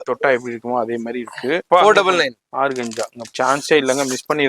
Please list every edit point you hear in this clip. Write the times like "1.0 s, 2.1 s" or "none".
1.6 s, 3.2 s